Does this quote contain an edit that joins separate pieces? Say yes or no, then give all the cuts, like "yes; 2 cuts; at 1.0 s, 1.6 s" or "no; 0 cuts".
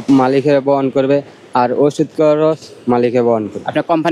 no; 0 cuts